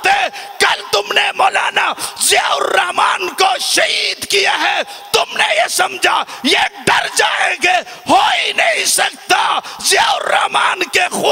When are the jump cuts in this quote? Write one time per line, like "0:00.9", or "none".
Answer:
none